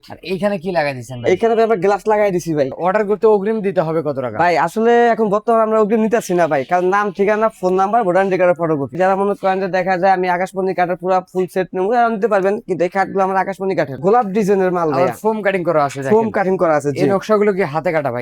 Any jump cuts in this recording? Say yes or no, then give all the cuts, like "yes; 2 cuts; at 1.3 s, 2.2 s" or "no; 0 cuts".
yes; 3 cuts; at 2.7 s, 8.9 s, 14.0 s